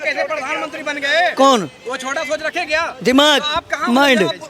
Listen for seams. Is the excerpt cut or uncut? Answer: uncut